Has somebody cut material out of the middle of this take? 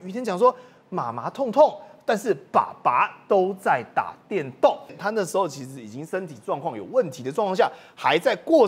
yes; 1 cut; at 5.0 s

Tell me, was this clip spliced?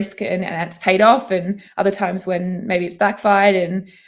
no; 0 cuts

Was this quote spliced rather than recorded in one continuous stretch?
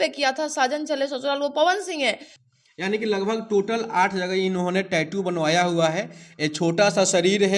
yes; 1 cut; at 2.3 s

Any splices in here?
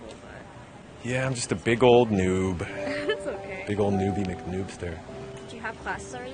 yes; 2 cuts; at 3.8 s, 5.3 s

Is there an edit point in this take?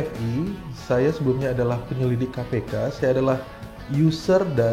no; 0 cuts

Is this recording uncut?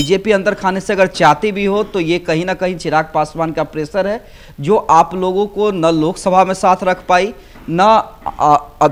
yes; 0 cuts

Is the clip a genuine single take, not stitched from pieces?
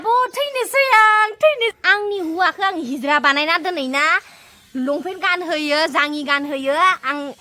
no; 1 cut; at 1.8 s

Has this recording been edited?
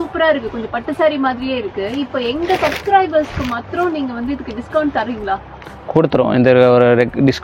no; 0 cuts

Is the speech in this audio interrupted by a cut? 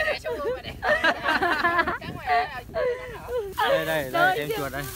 yes; 1 cut; at 3.5 s

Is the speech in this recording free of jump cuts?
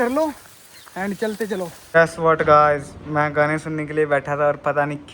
no; 1 cut; at 1.8 s

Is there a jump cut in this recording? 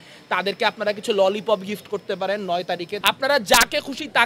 yes; 1 cut; at 2.9 s

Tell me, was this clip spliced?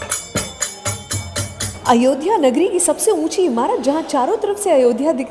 no; 0 cuts

